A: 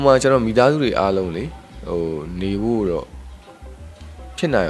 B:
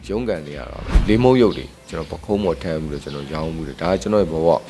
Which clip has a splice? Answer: B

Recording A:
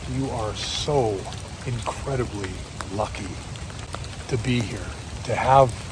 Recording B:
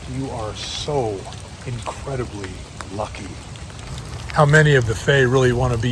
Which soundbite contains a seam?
B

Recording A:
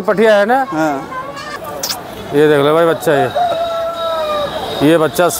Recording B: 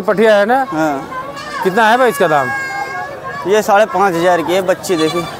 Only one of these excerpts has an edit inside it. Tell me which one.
A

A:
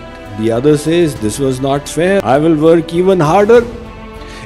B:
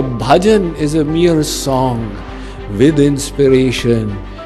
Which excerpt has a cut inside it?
A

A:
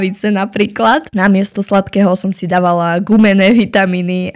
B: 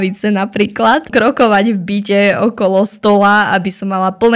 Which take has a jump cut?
B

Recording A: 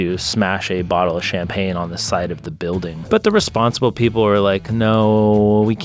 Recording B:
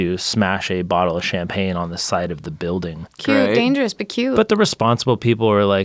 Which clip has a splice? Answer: A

